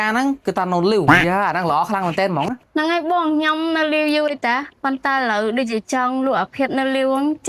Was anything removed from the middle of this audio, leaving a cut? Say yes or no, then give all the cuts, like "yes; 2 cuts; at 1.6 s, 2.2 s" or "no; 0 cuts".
no; 0 cuts